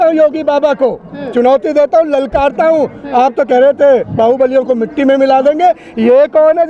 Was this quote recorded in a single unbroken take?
yes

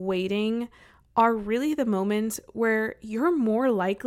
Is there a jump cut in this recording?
no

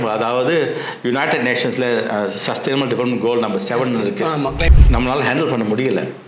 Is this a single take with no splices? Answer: no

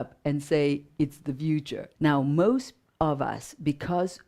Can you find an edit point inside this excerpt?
yes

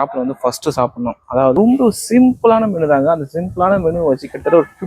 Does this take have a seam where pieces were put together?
yes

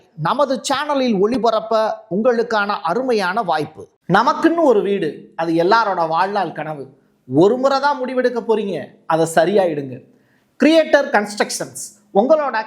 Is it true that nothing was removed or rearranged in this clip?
no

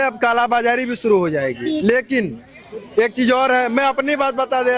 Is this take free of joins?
yes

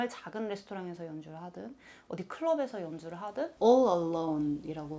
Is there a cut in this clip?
yes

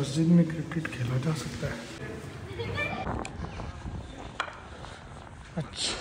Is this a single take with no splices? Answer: yes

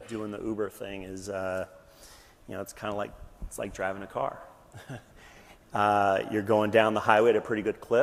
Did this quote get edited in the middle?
no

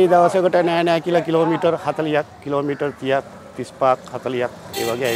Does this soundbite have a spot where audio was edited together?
no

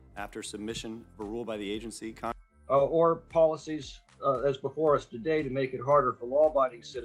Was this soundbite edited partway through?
no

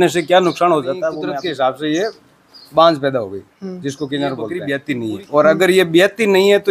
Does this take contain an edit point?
yes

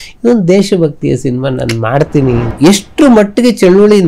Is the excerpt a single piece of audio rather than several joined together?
no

